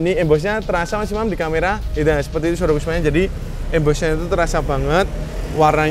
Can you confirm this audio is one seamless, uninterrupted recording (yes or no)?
yes